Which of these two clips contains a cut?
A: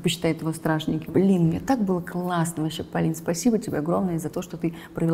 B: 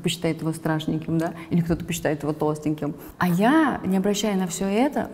A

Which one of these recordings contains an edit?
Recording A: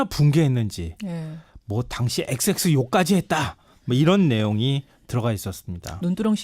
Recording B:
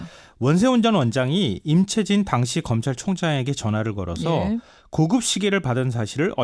A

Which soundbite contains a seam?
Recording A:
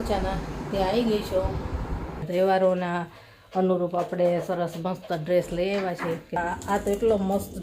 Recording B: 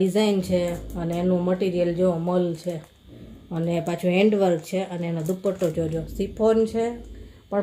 A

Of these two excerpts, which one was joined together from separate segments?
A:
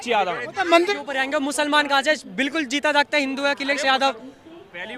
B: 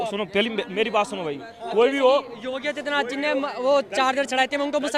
A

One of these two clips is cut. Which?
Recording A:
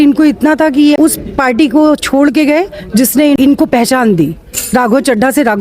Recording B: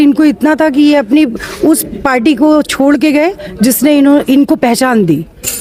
A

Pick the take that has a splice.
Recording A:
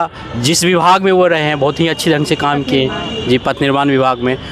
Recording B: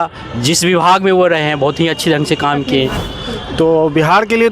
B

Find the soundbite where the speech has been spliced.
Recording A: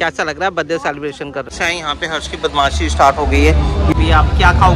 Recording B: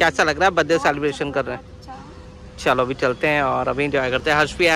A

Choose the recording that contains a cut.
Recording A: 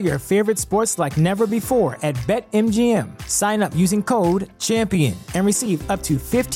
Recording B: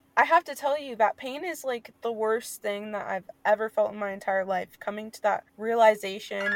B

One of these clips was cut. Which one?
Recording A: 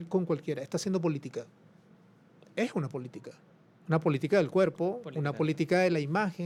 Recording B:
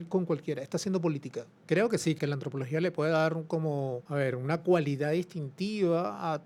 B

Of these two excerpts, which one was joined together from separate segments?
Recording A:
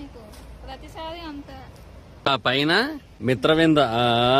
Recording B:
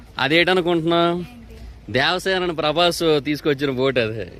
A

